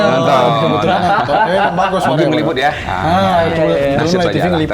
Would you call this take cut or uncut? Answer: uncut